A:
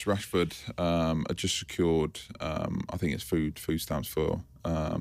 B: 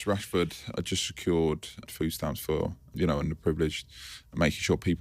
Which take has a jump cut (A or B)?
B